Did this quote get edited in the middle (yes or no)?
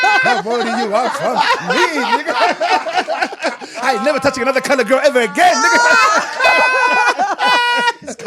no